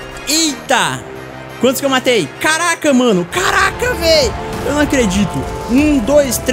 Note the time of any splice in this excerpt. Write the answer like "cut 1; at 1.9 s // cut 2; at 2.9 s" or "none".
none